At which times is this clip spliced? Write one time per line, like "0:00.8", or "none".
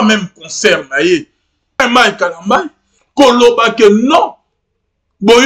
0:01.8